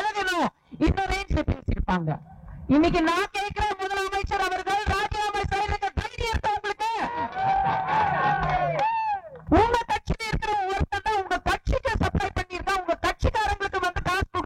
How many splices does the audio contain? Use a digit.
1